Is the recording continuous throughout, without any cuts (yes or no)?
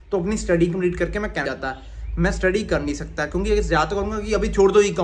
no